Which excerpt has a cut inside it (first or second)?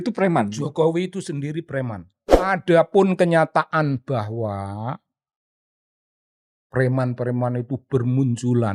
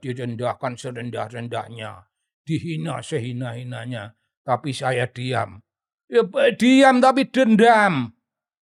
first